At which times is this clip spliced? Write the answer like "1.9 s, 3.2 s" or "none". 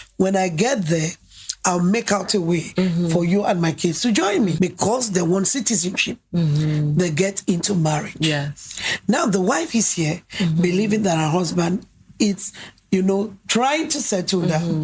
4.5 s